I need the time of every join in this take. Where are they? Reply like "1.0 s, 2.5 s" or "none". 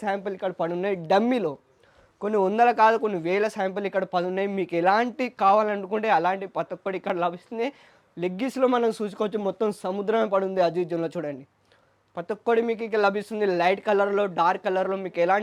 none